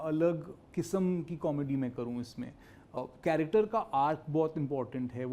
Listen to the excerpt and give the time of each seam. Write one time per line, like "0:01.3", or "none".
0:03.0